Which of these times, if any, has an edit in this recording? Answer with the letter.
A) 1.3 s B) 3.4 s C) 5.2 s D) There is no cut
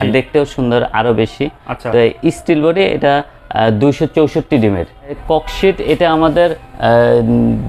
C